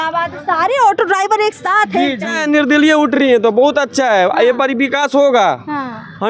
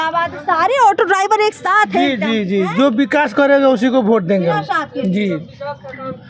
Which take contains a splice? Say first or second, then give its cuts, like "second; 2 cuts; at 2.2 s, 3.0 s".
first; 1 cut; at 2.4 s